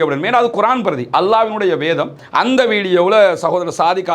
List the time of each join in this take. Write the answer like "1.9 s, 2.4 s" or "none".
2.2 s

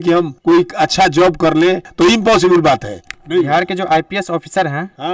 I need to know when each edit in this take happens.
1.9 s

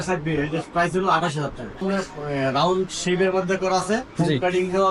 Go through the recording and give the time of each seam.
1.8 s

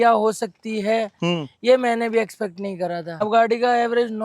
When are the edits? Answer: 3.2 s

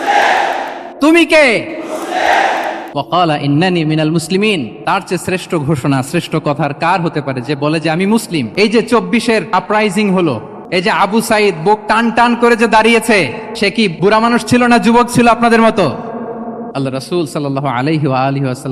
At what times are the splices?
2.8 s, 4.7 s, 8.5 s, 9.5 s, 10.5 s, 13.8 s, 16.7 s

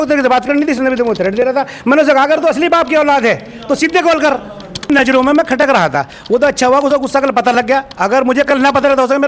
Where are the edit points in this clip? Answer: 4.9 s

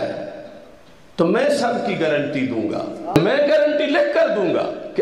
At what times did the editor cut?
3.1 s

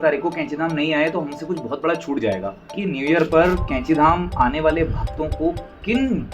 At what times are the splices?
2.8 s

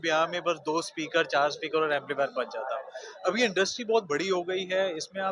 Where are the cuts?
none

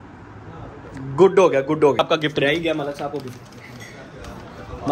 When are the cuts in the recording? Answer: 2.0 s

